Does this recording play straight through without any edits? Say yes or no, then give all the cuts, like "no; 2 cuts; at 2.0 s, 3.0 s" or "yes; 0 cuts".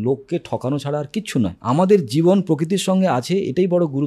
no; 1 cut; at 1.6 s